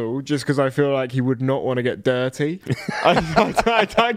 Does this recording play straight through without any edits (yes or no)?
no